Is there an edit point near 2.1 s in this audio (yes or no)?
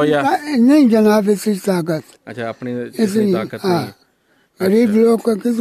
no